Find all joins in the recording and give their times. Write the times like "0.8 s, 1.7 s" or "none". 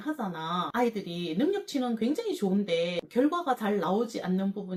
none